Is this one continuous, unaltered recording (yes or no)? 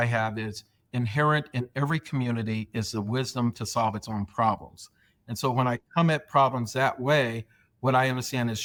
yes